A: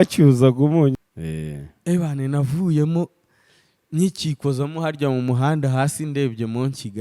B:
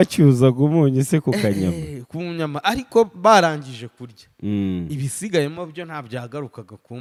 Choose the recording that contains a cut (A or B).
A